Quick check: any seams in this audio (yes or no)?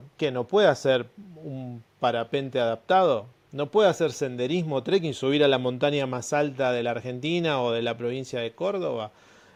no